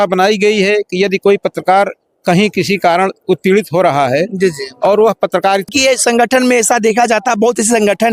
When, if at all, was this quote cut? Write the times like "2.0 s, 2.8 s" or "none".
5.6 s